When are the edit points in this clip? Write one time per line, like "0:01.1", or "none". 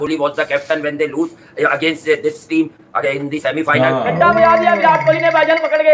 0:04.0